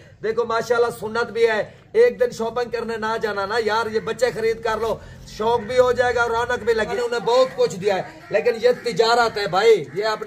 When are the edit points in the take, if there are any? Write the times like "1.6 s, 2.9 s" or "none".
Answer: 6.9 s